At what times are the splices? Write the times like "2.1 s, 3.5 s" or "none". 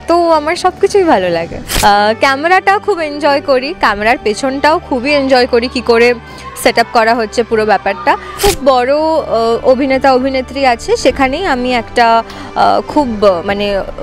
1.6 s, 8.3 s